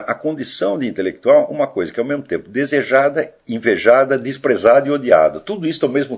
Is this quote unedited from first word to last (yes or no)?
yes